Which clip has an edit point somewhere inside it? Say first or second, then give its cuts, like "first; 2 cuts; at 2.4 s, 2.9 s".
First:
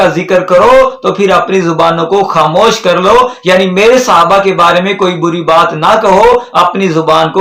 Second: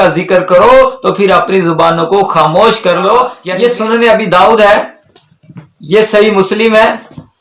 second; 1 cut; at 3.4 s